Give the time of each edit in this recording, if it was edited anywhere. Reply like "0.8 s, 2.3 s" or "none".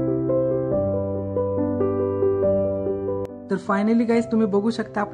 3.5 s